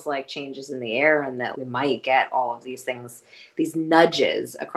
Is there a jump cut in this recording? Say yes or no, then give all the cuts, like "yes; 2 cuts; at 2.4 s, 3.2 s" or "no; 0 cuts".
yes; 1 cut; at 1.5 s